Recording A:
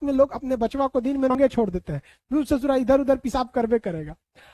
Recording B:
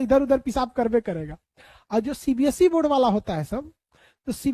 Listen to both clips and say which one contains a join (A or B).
A